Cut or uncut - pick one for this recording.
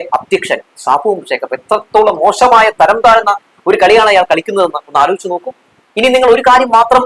cut